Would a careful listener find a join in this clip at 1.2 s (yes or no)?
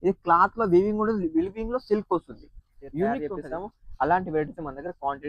no